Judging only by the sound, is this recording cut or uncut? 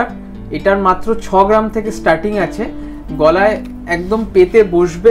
uncut